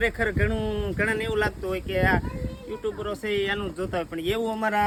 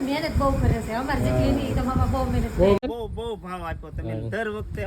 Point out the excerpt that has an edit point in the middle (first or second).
second